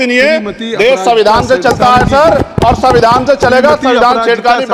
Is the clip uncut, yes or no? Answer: yes